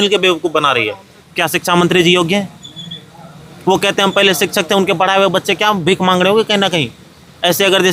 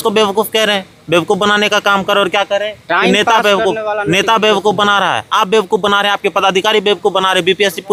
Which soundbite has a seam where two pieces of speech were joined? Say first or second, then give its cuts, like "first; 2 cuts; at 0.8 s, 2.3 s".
first; 1 cut; at 1.2 s